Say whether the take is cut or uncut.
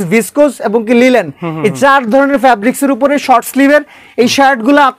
uncut